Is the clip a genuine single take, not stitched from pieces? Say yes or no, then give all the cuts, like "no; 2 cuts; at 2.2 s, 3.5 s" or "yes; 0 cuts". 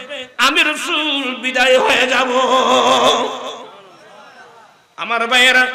yes; 0 cuts